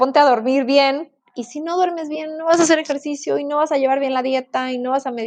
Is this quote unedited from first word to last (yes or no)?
yes